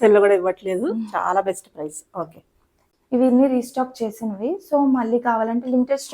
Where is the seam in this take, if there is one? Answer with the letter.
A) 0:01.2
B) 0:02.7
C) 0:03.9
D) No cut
B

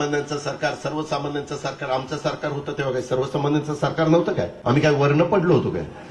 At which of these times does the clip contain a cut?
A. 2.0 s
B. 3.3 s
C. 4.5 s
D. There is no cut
C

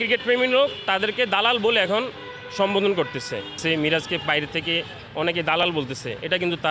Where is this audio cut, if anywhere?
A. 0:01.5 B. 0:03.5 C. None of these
B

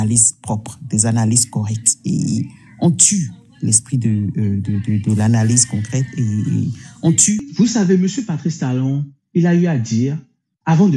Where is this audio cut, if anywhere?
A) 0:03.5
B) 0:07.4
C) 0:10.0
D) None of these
B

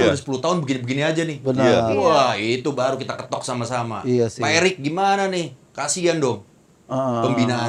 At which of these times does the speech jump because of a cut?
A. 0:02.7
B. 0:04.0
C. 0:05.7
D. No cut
D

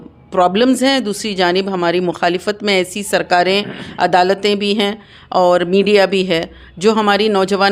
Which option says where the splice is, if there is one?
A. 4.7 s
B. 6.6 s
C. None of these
C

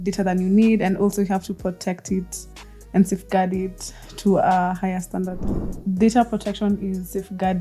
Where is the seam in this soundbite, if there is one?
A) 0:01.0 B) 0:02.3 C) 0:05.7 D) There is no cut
C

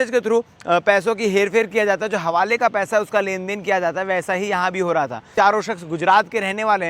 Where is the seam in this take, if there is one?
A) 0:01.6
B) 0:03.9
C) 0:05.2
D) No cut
C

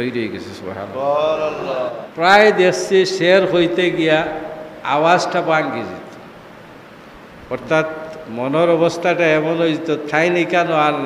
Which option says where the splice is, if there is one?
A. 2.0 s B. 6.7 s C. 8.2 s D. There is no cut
A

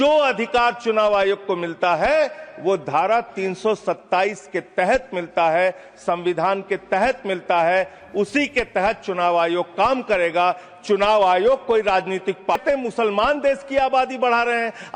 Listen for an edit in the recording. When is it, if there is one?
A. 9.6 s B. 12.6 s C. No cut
B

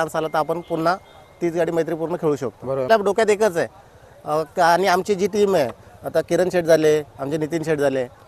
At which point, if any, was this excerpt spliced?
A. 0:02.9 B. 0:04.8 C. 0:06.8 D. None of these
A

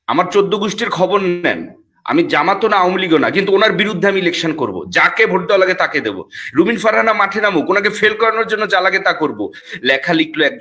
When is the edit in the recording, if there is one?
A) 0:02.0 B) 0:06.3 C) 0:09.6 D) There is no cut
C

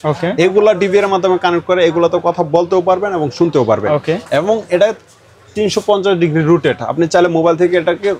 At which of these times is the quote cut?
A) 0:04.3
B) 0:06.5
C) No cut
C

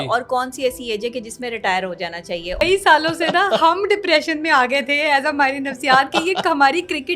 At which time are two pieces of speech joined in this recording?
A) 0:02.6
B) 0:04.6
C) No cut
A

